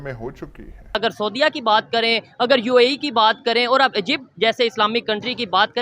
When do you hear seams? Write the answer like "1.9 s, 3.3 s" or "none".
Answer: 0.9 s